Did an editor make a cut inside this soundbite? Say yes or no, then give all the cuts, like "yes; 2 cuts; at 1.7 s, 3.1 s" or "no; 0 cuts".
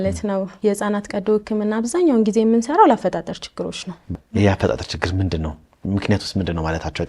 yes; 1 cut; at 4.1 s